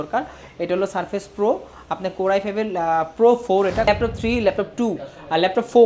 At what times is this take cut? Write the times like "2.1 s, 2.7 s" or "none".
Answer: 3.9 s